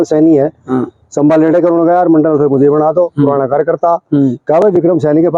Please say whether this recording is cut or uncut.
uncut